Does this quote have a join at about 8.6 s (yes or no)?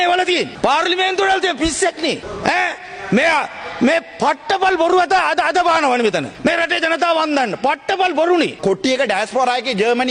yes